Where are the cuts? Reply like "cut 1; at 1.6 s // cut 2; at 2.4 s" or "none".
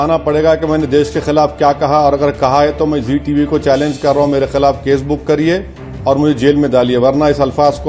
none